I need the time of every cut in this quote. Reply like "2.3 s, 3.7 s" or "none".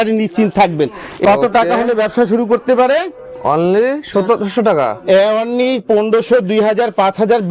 1.2 s